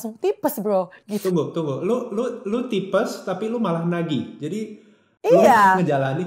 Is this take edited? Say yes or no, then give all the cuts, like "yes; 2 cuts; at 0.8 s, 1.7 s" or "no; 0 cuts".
yes; 1 cut; at 1.3 s